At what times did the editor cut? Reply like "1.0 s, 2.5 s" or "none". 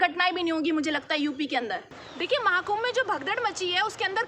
none